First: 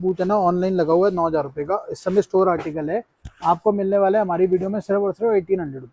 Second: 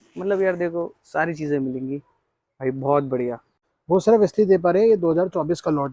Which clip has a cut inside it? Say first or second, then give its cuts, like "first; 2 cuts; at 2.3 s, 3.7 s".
second; 1 cut; at 3.5 s